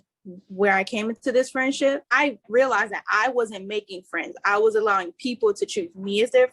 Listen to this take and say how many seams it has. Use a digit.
1